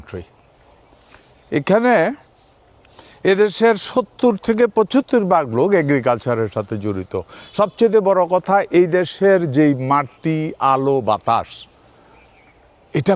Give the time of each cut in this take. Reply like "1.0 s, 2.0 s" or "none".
none

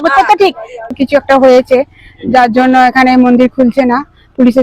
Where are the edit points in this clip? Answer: 0.9 s

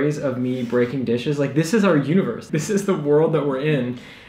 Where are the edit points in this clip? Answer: 2.5 s

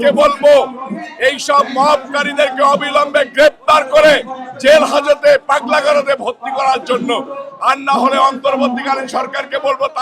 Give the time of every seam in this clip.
none

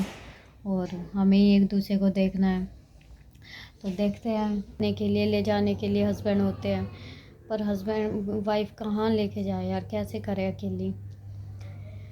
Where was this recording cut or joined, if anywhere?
4.8 s

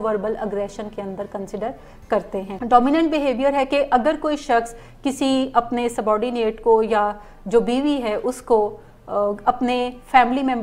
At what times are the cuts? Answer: 2.5 s

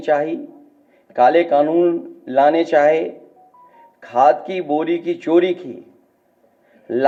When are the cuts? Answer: none

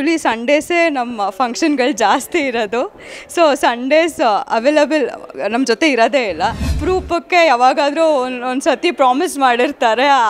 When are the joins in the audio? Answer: 6.7 s

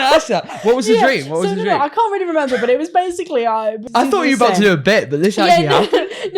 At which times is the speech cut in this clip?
3.8 s

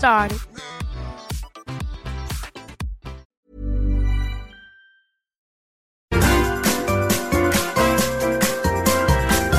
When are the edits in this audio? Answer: 3.3 s, 5.6 s

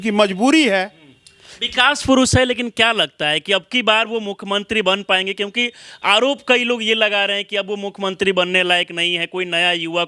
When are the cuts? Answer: none

